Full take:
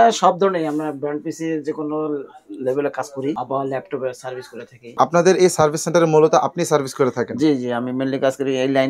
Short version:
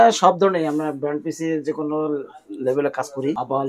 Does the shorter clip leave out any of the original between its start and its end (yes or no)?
no